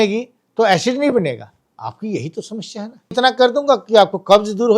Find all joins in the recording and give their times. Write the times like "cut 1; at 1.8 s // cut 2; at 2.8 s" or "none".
cut 1; at 3.1 s

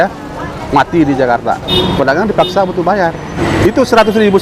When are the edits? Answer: cut 1; at 1.7 s // cut 2; at 3.4 s

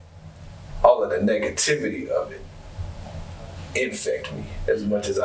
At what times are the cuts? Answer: none

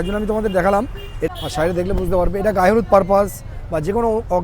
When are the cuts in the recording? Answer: cut 1; at 1.3 s

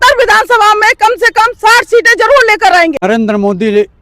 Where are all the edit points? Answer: cut 1; at 3.0 s

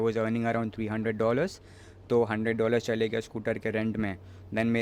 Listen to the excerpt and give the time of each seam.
none

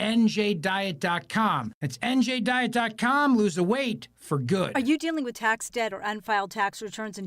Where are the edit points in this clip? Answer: cut 1; at 4.7 s

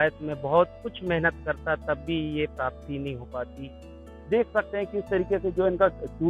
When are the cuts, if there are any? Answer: cut 1; at 4.1 s

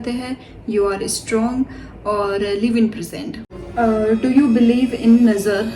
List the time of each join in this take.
none

